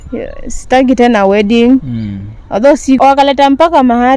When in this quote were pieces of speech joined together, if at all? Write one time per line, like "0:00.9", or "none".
0:03.0